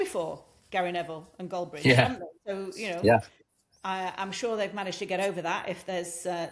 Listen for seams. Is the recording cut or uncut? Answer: uncut